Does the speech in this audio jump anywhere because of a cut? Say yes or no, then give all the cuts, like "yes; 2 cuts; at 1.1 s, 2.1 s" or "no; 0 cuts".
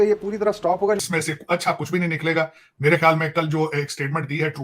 yes; 1 cut; at 1.0 s